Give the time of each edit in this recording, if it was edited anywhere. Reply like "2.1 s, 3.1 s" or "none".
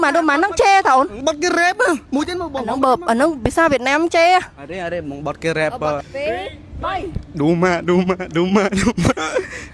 1.1 s, 6.1 s

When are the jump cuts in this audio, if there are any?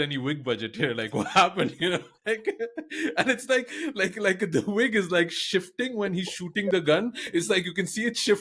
none

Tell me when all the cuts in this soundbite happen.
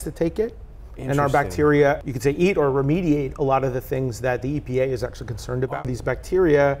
2.1 s, 5.7 s

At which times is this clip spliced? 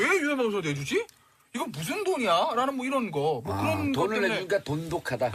0.9 s

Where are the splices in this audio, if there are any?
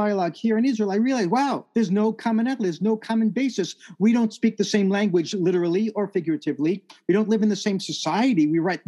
1.6 s

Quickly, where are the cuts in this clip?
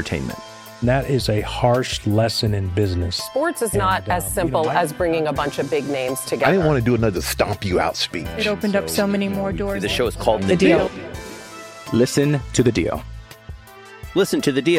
none

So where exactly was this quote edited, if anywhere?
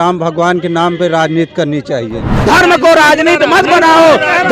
2.3 s

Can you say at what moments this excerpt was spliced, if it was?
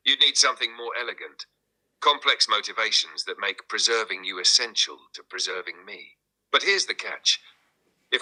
none

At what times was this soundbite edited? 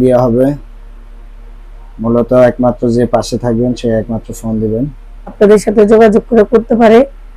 5.3 s

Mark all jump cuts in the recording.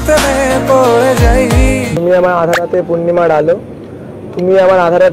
1.9 s

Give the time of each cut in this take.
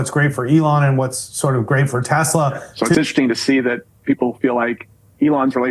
2.9 s

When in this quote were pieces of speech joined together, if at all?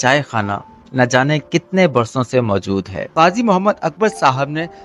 3.1 s

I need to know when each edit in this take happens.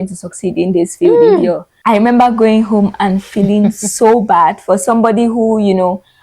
1.7 s

